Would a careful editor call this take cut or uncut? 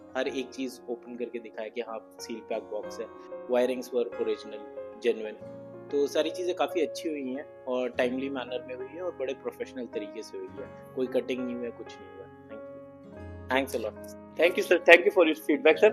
uncut